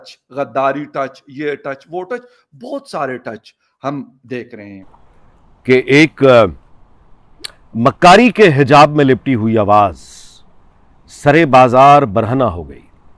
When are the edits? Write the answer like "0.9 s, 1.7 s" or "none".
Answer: 5.2 s